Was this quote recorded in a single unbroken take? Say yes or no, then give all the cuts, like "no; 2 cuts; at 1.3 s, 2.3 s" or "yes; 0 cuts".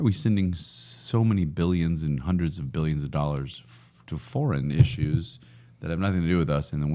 yes; 0 cuts